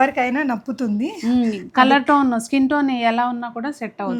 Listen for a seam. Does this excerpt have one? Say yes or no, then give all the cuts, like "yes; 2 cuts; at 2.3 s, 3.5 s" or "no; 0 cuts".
no; 0 cuts